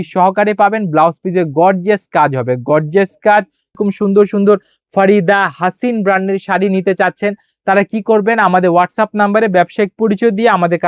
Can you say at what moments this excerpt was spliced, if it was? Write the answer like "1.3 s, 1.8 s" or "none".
3.8 s